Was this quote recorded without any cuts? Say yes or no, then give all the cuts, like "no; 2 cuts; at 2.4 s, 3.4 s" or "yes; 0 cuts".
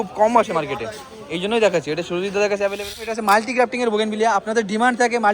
no; 1 cut; at 3.1 s